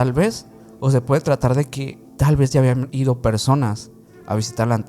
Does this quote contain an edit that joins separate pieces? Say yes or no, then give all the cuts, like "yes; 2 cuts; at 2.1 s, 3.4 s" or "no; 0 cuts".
yes; 1 cut; at 2.9 s